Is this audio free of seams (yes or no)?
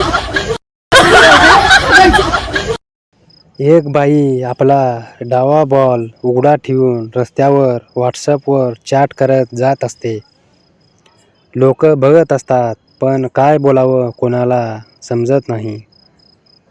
no